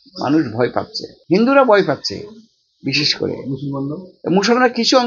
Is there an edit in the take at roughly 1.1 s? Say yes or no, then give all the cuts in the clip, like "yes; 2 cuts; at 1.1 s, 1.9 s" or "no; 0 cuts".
yes; 1 cut; at 1.1 s